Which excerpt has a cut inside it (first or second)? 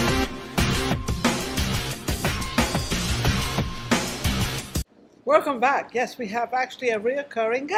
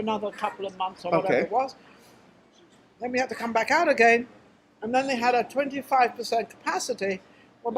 second